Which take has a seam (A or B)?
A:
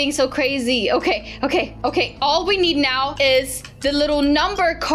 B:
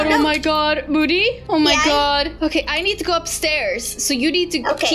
A